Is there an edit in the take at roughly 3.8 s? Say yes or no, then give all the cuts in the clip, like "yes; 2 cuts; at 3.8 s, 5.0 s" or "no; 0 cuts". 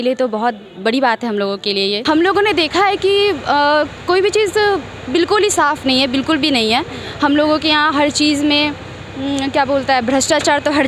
no; 1 cut; at 2.0 s